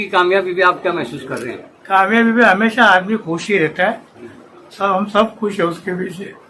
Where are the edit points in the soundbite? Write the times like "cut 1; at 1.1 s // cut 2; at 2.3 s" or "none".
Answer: none